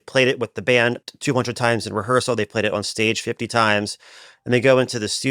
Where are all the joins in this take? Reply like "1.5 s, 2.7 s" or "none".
1.1 s